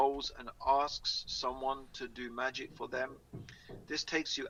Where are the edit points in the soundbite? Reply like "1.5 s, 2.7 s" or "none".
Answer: none